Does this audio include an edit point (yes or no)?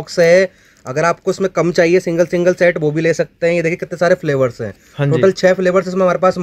no